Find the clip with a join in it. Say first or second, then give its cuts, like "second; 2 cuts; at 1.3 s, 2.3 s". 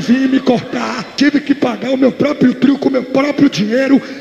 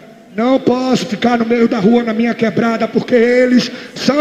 first; 1 cut; at 1.0 s